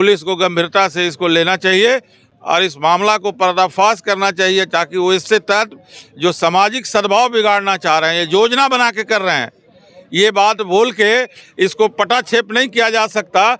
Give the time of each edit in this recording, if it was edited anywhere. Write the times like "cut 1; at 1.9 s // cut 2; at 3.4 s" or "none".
none